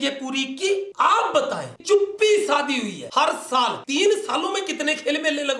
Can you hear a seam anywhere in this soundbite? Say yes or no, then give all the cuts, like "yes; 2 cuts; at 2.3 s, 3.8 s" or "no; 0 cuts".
yes; 2 cuts; at 1.8 s, 3.0 s